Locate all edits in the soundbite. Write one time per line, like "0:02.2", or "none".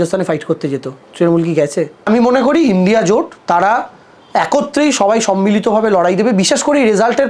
0:02.1